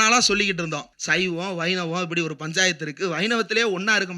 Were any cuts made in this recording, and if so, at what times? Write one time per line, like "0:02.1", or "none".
0:00.9